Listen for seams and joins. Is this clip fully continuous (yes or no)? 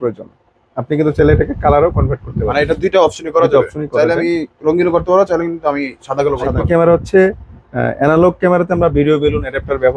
no